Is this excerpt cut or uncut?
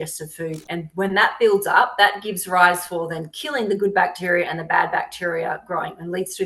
uncut